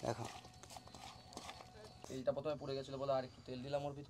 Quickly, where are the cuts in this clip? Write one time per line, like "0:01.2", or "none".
0:02.0